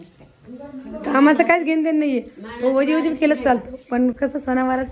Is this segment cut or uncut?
uncut